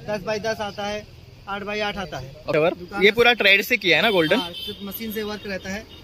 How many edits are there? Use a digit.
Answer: 1